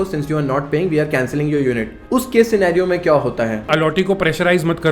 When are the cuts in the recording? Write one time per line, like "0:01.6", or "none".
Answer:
0:01.9
0:03.7